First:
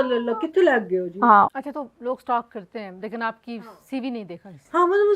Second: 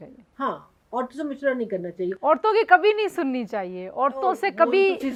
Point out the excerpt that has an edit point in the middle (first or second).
first